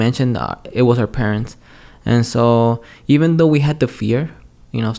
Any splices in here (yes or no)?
no